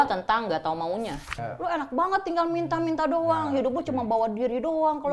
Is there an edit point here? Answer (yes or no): yes